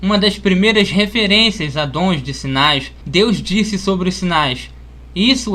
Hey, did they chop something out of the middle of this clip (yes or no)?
no